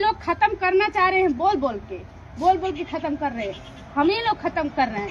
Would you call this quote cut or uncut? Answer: uncut